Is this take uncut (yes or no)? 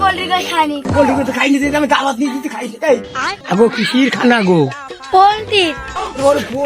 no